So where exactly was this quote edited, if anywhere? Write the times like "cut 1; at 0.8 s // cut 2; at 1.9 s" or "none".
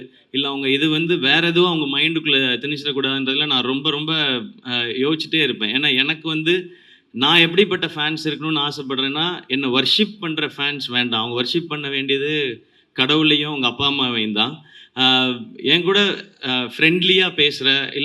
none